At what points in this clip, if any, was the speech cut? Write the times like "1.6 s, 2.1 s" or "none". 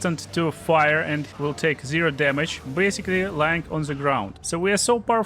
1.3 s, 4.4 s